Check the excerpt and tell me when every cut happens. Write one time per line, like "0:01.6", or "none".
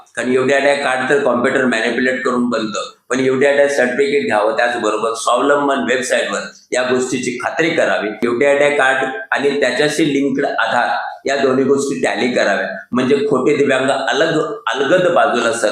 0:08.2